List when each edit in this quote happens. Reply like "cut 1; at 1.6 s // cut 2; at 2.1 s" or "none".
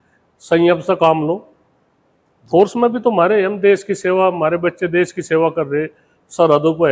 none